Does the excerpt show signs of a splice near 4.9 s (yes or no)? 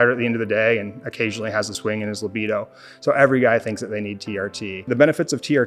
yes